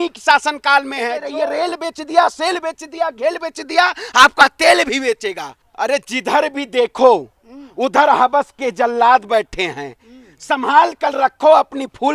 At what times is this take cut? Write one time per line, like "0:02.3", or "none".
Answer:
0:01.2
0:05.6